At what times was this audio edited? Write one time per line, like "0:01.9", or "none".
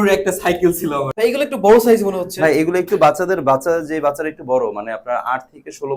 0:01.1